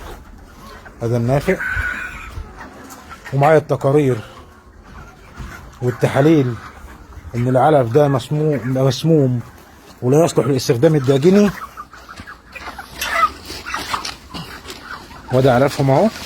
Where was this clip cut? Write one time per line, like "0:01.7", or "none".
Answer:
0:00.9